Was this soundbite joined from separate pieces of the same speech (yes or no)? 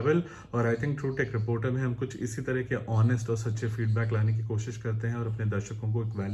no